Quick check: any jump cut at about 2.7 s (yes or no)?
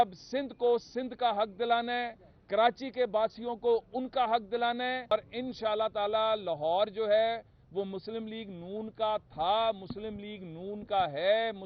no